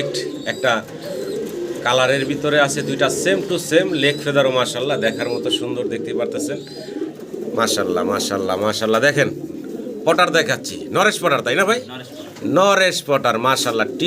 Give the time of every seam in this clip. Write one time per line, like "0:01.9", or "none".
0:07.1